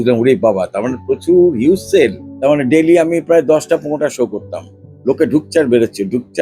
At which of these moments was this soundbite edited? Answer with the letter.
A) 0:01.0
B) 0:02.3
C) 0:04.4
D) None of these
B